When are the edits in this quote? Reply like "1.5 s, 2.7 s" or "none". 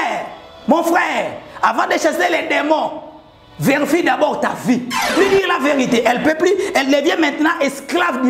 5.1 s

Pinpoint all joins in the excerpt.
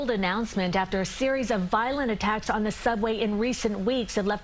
none

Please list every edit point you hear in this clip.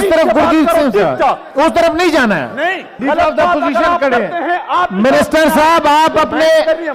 2.9 s

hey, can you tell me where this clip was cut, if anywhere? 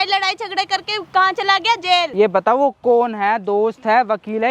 2.1 s

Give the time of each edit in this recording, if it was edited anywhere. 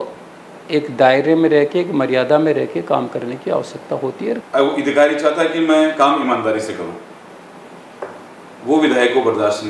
4.4 s

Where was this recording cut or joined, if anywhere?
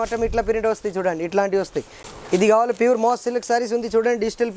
2.0 s

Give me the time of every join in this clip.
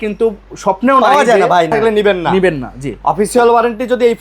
1.7 s

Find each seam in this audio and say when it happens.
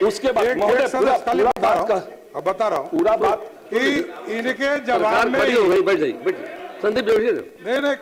none

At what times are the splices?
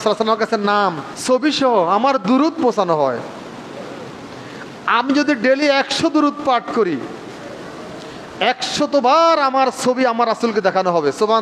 1.1 s

